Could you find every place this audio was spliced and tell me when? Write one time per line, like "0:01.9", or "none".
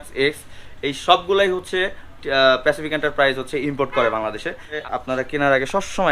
0:04.8